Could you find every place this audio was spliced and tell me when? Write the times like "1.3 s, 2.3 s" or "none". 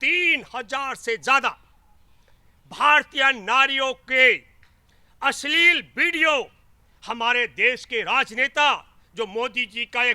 none